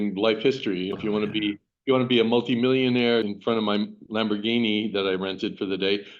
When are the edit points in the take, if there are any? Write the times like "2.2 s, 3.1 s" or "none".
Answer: 0.9 s, 3.3 s